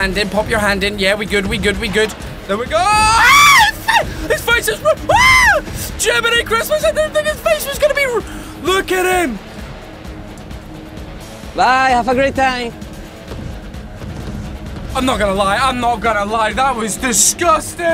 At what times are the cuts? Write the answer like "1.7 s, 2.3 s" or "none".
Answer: none